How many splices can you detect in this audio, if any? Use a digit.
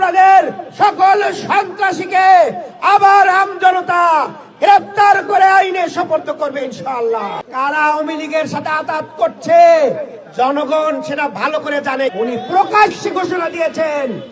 2